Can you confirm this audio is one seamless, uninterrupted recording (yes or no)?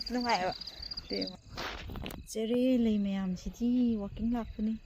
no